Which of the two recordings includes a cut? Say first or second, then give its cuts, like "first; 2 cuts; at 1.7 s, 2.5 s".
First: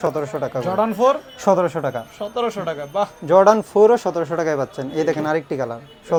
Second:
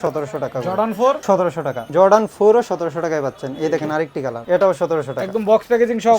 second; 2 cuts; at 1.4 s, 4.4 s